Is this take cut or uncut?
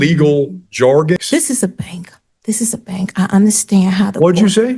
cut